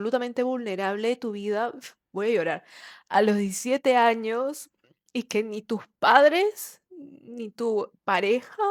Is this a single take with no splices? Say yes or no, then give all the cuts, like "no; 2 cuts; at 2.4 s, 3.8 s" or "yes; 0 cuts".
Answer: yes; 0 cuts